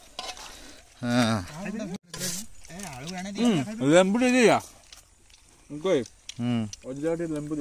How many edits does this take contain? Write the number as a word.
one